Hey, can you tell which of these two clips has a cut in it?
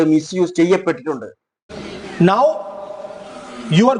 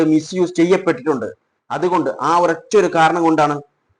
first; 1 cut; at 1.6 s

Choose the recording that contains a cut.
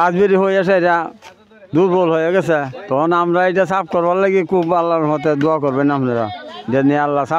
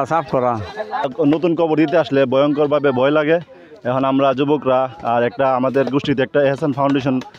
second; 1 cut; at 1.1 s

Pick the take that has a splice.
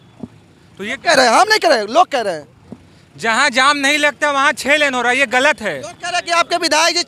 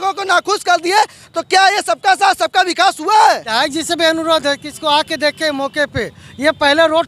second; 1 cut; at 3.4 s

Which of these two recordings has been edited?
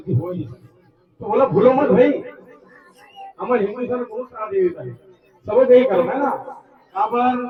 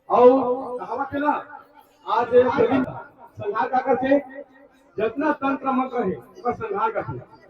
second; 1 cut; at 2.8 s

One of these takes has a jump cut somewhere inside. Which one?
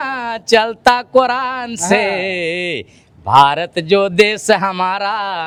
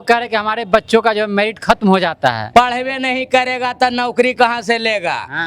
second; 1 cut; at 2.4 s

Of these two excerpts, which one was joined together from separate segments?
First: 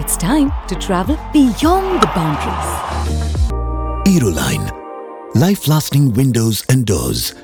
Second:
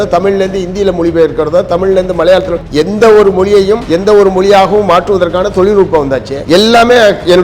second; 3 cuts; at 2.6 s, 3.9 s, 6.3 s

